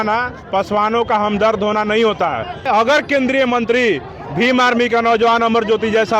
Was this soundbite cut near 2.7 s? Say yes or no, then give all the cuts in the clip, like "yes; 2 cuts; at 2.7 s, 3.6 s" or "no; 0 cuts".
yes; 1 cut; at 2.7 s